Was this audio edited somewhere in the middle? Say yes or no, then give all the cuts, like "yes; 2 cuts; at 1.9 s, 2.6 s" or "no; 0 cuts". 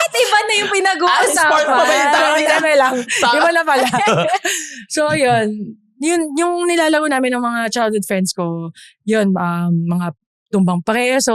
no; 0 cuts